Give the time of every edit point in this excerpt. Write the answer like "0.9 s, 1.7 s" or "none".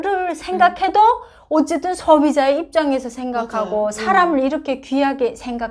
none